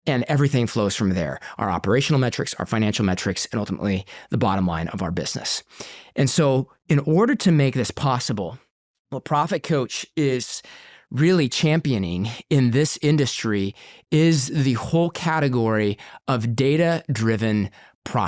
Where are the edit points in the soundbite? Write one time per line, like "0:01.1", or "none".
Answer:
none